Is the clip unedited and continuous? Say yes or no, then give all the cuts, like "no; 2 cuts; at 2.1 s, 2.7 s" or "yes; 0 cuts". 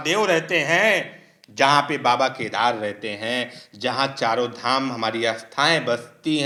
yes; 0 cuts